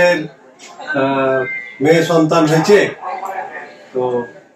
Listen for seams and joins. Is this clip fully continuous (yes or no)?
yes